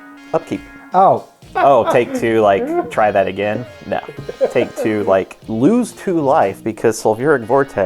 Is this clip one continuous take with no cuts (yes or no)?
no